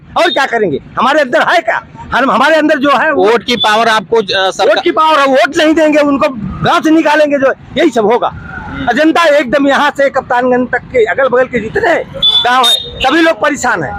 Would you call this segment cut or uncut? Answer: uncut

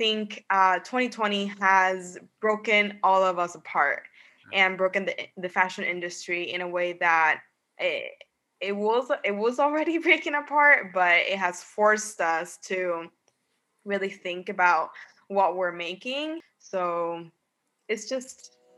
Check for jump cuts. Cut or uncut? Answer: cut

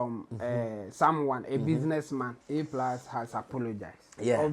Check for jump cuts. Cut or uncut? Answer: cut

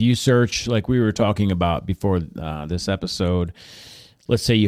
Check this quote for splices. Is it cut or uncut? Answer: uncut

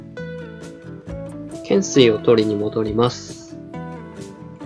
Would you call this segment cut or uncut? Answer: cut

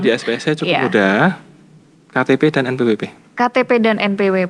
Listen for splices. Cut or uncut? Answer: uncut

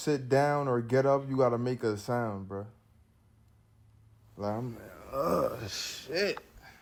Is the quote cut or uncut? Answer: uncut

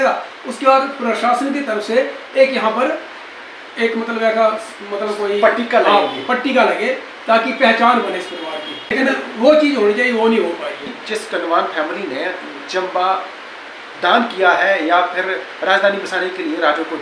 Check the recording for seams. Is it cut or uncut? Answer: cut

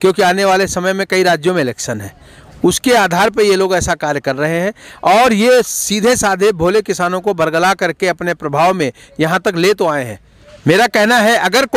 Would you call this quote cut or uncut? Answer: uncut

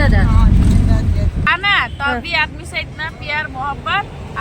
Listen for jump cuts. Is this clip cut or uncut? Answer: cut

